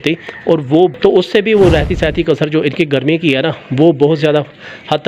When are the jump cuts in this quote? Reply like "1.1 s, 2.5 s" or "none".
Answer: 0.9 s